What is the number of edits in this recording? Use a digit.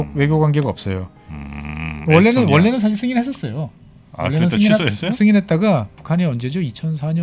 1